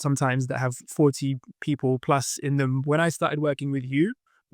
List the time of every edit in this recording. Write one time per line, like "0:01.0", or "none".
0:02.8